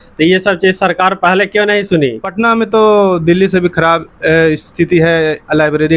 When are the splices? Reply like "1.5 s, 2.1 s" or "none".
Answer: 2.3 s